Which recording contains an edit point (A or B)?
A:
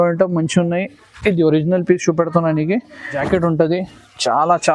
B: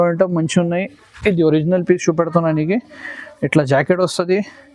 A